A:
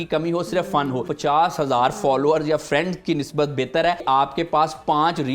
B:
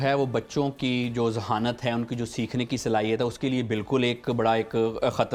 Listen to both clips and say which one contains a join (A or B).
A